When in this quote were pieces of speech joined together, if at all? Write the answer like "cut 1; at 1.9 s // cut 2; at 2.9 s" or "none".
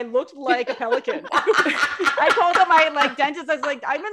none

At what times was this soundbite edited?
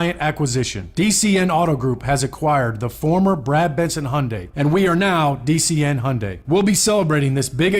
cut 1; at 4.4 s // cut 2; at 6.3 s

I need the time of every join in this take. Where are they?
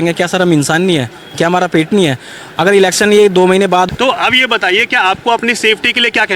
cut 1; at 3.9 s

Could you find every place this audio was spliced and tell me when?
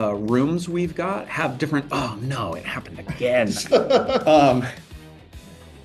none

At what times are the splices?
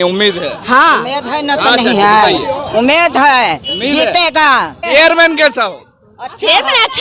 cut 1; at 4.8 s

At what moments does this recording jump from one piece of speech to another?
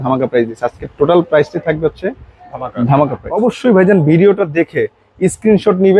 cut 1; at 3.2 s

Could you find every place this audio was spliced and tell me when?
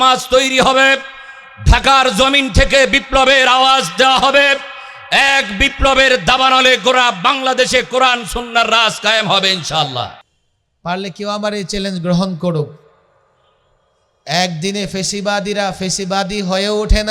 cut 1; at 10.2 s

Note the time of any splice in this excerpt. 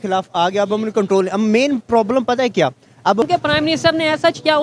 cut 1; at 3.2 s

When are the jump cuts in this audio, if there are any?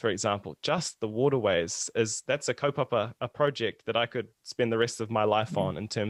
none

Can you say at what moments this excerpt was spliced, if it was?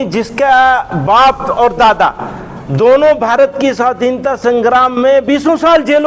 none

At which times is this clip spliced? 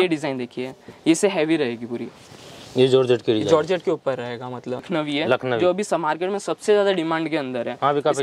cut 1; at 4.9 s

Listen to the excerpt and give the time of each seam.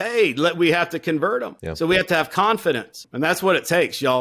cut 1; at 1.6 s // cut 2; at 3.0 s

